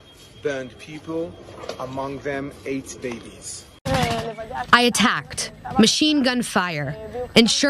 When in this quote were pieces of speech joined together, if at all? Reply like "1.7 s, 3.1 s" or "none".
3.8 s

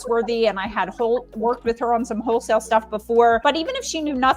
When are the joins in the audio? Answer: 3.4 s

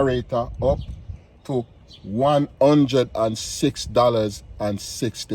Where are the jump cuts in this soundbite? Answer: none

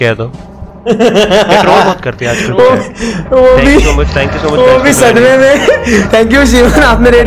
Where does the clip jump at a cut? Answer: none

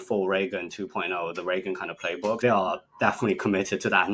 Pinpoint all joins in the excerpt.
2.4 s

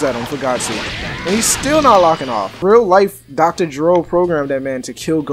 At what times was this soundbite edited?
2.5 s

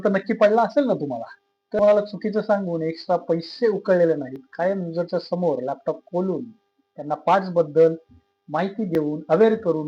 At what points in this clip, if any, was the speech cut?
1.8 s

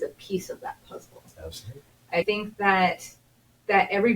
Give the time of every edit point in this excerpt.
2.2 s

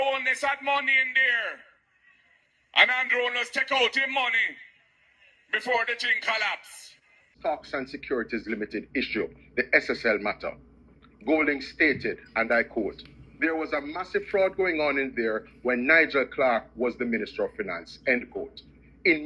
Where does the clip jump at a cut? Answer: 7.3 s

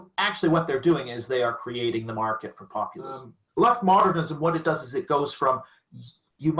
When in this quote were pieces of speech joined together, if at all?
3.3 s

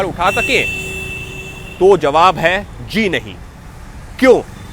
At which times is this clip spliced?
none

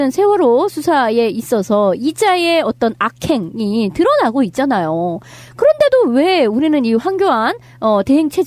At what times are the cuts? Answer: 2.1 s

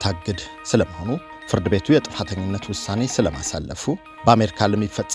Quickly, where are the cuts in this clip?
1.3 s, 4.1 s

